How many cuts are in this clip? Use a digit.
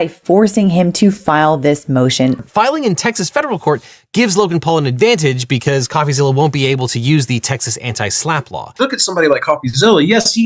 2